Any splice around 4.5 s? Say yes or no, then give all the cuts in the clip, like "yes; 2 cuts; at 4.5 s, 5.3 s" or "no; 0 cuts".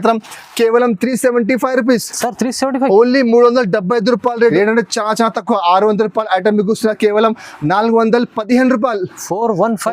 yes; 1 cut; at 4.5 s